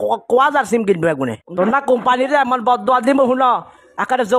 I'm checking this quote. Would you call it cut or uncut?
cut